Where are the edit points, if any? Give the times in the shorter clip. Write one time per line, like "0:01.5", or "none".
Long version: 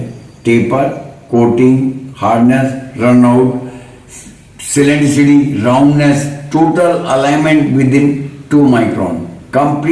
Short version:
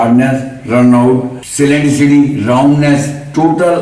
0:01.4